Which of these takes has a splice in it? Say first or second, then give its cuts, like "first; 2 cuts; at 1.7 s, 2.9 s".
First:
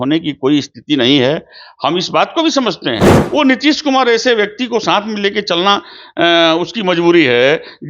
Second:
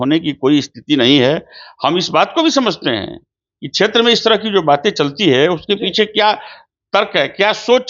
first; 1 cut; at 3.1 s